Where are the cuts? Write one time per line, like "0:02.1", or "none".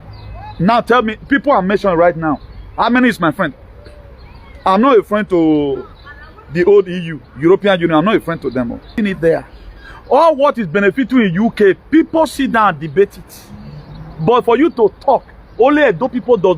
0:08.9